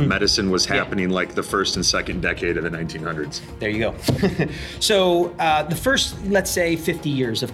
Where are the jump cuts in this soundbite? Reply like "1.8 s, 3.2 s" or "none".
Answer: none